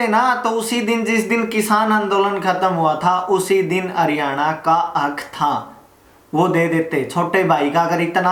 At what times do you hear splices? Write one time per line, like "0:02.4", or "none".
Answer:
none